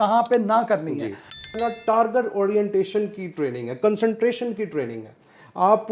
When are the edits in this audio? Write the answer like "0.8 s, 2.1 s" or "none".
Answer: 1.6 s